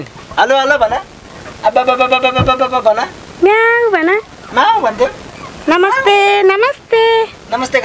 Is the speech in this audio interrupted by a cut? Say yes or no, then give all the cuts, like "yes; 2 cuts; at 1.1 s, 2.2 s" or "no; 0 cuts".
no; 0 cuts